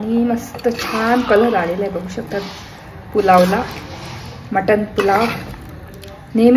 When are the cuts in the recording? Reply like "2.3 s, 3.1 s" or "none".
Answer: none